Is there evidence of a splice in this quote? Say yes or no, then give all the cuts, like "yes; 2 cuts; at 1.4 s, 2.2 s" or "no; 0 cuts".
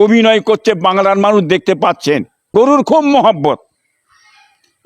yes; 1 cut; at 2.3 s